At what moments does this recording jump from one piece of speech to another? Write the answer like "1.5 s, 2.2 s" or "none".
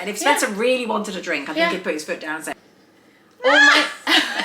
2.5 s

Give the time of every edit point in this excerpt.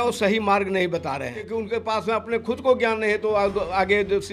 1.4 s

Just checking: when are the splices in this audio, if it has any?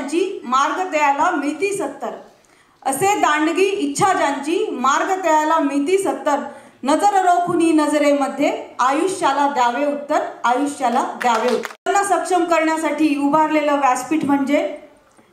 11.9 s

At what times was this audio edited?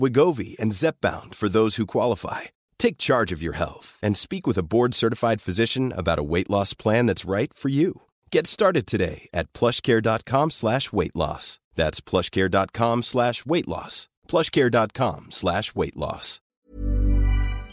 16.5 s

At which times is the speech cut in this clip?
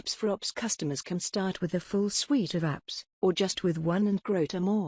3.5 s

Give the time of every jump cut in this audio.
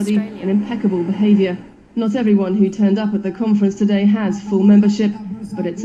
none

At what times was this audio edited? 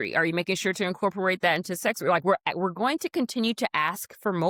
none

